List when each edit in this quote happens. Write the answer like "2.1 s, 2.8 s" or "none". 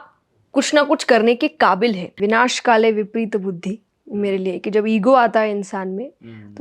2.2 s